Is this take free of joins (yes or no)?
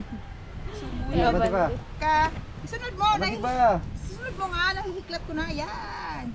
yes